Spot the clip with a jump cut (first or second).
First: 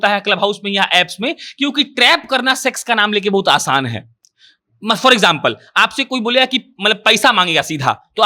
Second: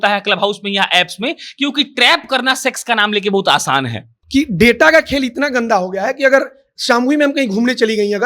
second